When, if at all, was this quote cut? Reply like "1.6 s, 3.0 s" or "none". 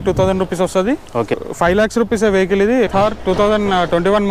1.4 s, 2.9 s